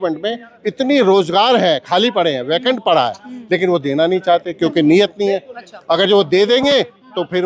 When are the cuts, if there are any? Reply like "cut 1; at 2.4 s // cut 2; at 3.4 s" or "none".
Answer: none